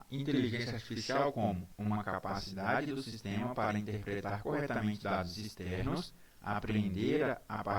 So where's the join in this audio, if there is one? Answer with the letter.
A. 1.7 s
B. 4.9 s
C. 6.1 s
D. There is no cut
A